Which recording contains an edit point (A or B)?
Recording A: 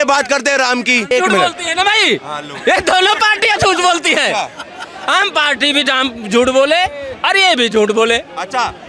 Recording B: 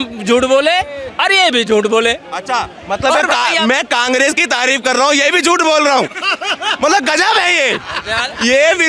A